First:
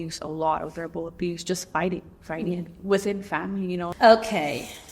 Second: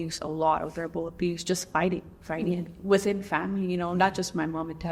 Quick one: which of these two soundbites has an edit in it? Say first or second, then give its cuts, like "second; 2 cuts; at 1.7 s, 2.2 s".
first; 1 cut; at 3.9 s